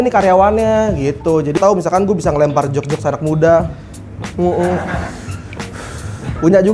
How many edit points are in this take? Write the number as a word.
one